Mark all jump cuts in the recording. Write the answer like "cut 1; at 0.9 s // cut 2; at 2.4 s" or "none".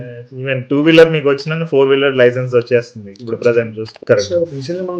cut 1; at 3.9 s